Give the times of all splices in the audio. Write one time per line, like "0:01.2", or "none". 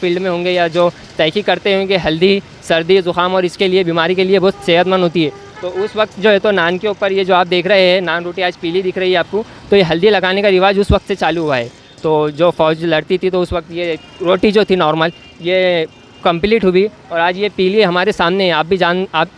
none

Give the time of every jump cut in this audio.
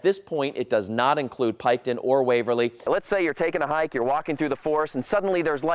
0:02.8

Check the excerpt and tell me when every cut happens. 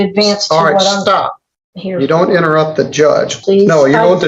0:03.4

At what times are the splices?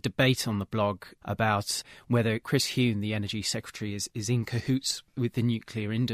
0:02.4
0:05.1

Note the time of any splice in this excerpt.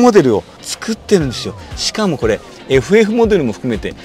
0:02.5

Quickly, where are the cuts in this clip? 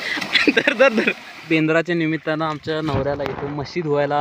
0:01.4

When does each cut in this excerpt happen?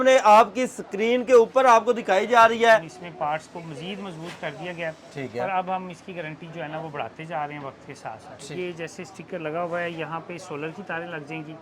0:03.0
0:08.4

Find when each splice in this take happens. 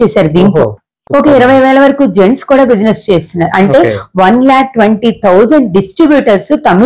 none

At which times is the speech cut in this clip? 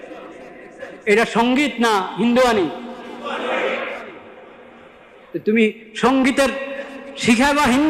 none

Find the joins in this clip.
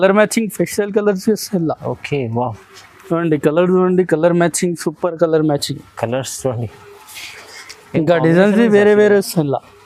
none

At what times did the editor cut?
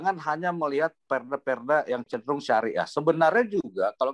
none

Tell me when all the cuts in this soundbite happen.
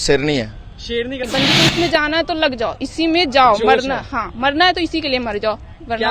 0:01.3

